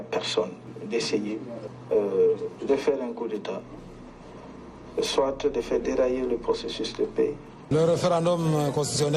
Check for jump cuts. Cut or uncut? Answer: cut